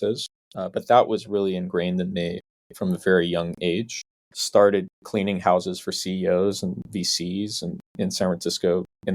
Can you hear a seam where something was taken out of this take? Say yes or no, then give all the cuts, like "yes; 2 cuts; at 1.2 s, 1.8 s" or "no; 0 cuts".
yes; 1 cut; at 4.2 s